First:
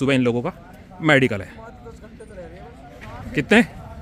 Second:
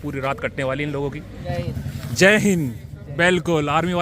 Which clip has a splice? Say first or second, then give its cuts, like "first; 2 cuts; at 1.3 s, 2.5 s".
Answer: second; 1 cut; at 1.4 s